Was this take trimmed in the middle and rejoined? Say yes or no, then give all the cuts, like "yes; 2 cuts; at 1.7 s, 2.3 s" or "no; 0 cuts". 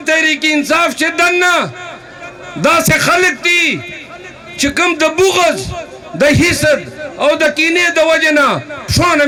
no; 0 cuts